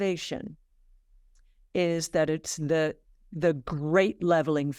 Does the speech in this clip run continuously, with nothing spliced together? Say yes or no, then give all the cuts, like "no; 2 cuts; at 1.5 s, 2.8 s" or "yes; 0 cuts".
yes; 0 cuts